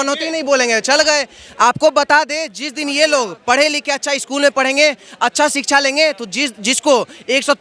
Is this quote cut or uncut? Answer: uncut